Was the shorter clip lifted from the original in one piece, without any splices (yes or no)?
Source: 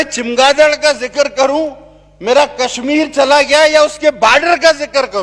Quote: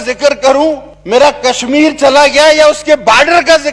no